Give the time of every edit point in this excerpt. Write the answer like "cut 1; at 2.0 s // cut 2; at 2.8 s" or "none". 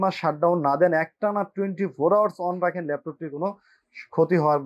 none

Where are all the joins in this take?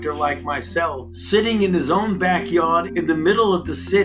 cut 1; at 1.1 s // cut 2; at 2.9 s

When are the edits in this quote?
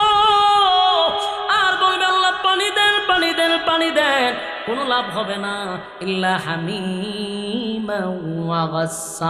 none

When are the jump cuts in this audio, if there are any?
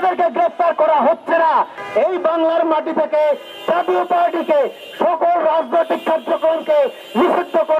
cut 1; at 1.8 s

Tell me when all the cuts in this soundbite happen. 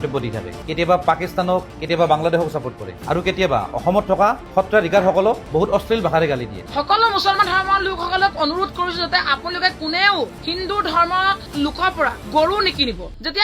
cut 1; at 6.6 s

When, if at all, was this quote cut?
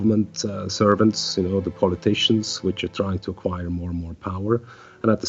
none

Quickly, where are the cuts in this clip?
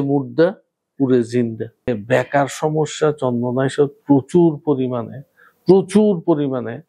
cut 1; at 1.9 s

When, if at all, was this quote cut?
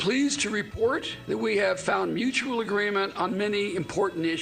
none

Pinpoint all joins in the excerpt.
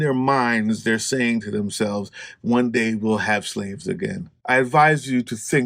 cut 1; at 4.3 s

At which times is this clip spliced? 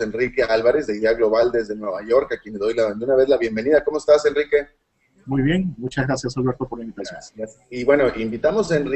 cut 1; at 6.1 s

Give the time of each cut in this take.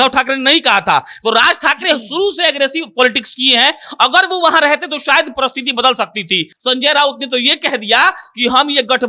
cut 1; at 6.5 s

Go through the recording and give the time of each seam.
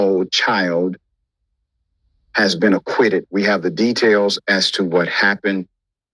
cut 1; at 3.4 s

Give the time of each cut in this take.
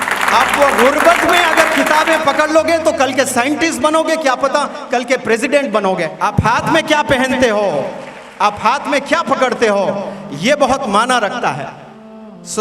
cut 1; at 6.1 s

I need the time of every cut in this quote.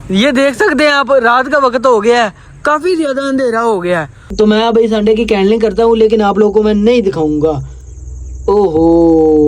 cut 1; at 4.2 s

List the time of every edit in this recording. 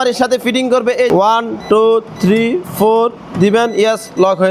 cut 1; at 1.1 s

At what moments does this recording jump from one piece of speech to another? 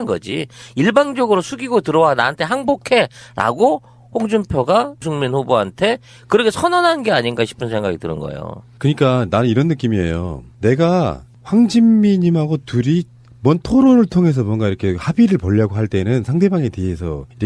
cut 1; at 9.6 s

